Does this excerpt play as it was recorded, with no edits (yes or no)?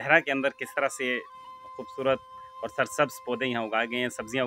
yes